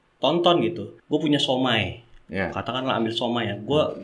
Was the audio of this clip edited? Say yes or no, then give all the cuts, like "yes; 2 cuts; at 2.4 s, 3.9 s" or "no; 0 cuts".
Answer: yes; 1 cut; at 0.9 s